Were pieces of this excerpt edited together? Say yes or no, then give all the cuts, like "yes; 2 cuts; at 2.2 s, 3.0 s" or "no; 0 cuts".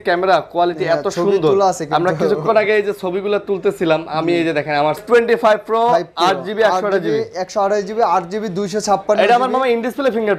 yes; 1 cut; at 5.0 s